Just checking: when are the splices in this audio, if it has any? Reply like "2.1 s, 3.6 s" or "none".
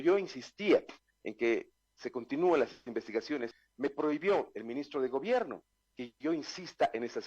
3.6 s

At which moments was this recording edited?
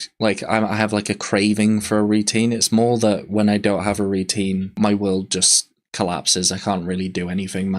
4.7 s

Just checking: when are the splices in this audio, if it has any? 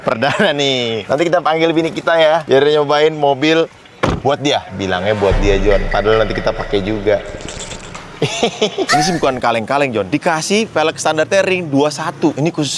1.0 s, 9.0 s

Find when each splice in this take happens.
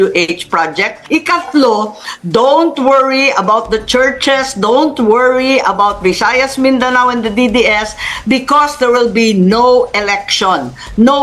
0.9 s

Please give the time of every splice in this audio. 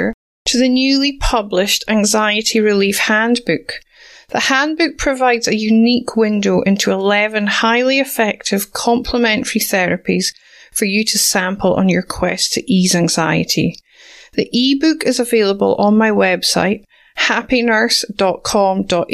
none

